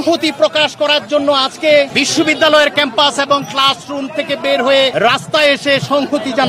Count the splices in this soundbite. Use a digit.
2